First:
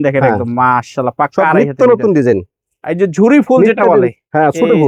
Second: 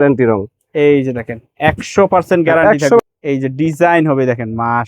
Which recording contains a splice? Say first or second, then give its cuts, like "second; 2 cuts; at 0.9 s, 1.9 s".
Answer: second; 1 cut; at 3.0 s